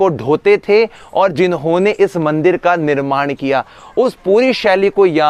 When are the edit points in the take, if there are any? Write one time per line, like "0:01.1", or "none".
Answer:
none